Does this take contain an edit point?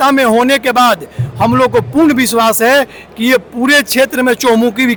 no; 0 cuts

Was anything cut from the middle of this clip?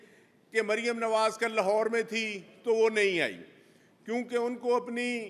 no; 0 cuts

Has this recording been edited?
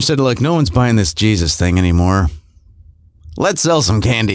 no; 0 cuts

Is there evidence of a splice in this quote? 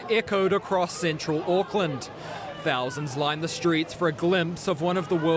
no; 0 cuts

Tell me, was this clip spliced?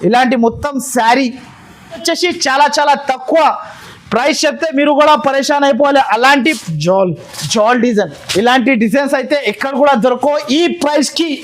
yes; 2 cuts; at 2.0 s, 6.6 s

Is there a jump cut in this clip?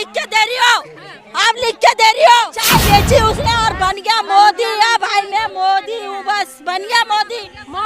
yes; 1 cut; at 2.6 s

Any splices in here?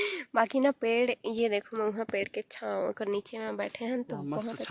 no; 0 cuts

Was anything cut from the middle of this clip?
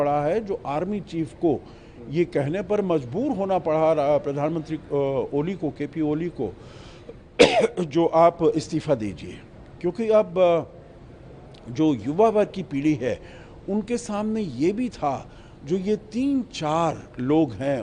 no; 0 cuts

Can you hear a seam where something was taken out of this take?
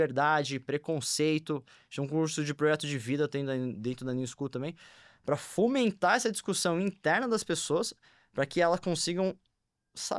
no; 0 cuts

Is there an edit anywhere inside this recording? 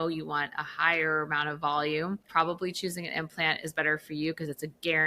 yes; 1 cut; at 2.2 s

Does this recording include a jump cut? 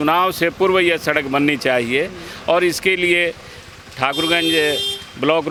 no; 0 cuts

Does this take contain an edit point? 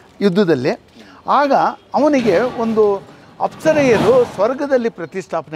no; 0 cuts

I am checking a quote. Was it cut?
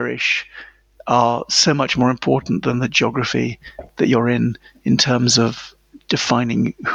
no; 0 cuts

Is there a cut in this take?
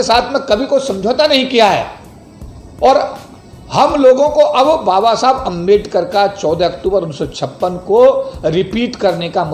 no; 0 cuts

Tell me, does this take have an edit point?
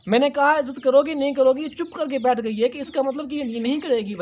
no; 0 cuts

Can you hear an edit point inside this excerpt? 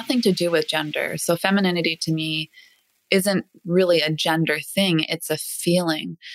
no; 0 cuts

